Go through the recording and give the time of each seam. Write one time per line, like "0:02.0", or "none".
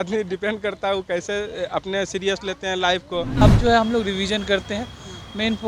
0:03.4